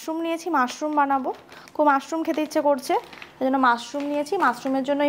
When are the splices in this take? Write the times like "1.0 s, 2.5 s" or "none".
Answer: none